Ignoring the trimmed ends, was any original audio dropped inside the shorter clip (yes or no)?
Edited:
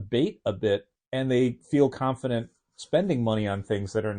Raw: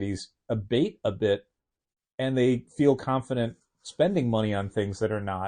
yes